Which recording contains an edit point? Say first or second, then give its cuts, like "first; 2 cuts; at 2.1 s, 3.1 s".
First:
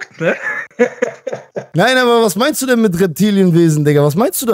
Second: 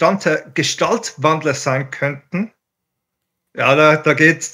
first; 1 cut; at 1.5 s